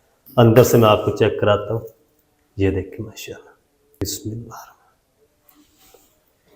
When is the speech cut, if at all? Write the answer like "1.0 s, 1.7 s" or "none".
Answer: 4.0 s

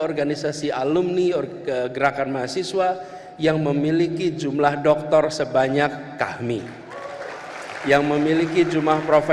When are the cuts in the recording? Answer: none

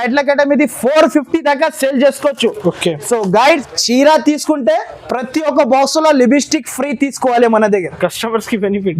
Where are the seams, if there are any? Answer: 3.6 s

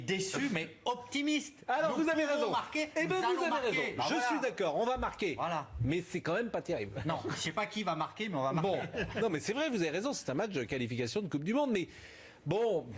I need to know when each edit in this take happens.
7.3 s

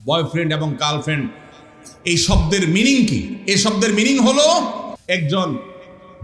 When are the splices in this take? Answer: 4.9 s

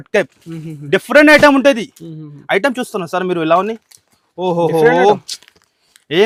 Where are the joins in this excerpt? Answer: none

